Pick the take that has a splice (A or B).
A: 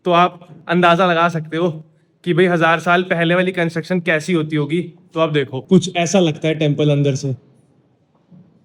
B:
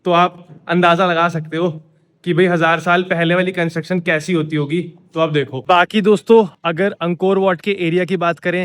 B